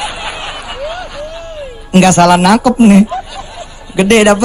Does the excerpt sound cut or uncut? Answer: uncut